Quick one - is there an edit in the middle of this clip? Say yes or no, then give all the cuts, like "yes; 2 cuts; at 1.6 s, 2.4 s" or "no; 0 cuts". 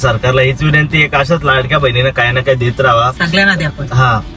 no; 0 cuts